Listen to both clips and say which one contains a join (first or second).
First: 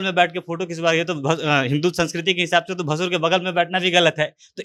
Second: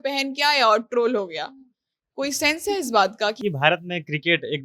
second